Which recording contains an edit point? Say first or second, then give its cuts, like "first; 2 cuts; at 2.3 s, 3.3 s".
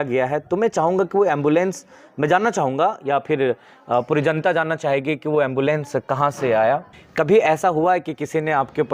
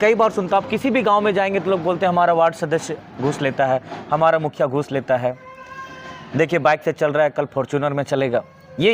first; 1 cut; at 7.0 s